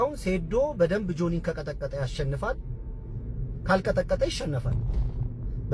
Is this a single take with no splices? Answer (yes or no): yes